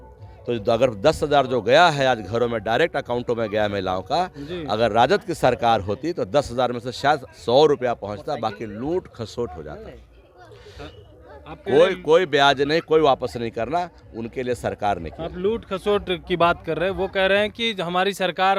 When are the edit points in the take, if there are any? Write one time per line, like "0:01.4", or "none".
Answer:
none